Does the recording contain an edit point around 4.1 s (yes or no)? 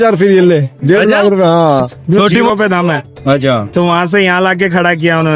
no